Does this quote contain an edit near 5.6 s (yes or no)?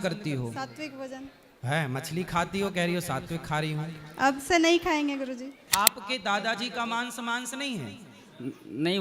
yes